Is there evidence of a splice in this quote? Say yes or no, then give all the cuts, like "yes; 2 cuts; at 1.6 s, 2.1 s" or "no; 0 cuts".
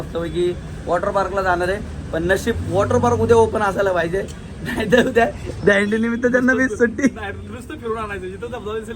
no; 0 cuts